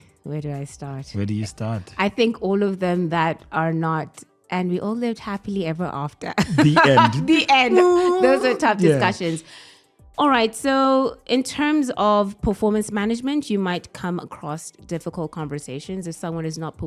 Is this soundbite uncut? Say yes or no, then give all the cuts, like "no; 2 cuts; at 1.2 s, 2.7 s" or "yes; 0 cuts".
yes; 0 cuts